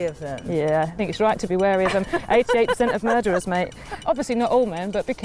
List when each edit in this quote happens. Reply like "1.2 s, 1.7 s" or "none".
1.0 s, 4.0 s